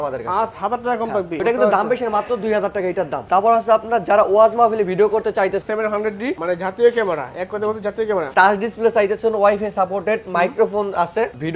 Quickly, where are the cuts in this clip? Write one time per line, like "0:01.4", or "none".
0:03.2
0:05.6
0:08.3